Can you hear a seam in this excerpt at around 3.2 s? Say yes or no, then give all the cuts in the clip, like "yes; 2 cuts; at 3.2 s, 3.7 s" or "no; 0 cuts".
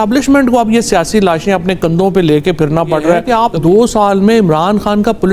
yes; 1 cut; at 3.2 s